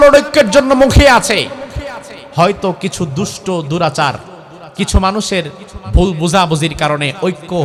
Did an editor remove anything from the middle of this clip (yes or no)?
no